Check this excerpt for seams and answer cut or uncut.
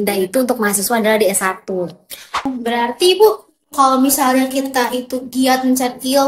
cut